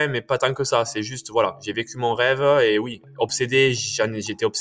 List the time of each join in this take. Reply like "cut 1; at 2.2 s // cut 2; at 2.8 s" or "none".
cut 1; at 3.0 s